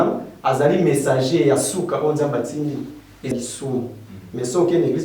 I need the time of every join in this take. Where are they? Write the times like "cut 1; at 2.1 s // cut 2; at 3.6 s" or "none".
cut 1; at 3.3 s